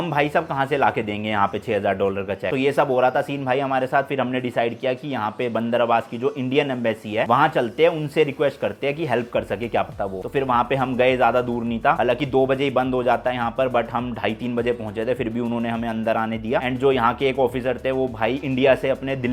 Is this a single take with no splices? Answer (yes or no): yes